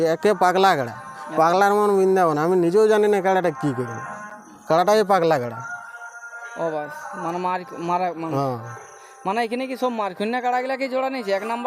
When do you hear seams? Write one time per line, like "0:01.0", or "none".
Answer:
none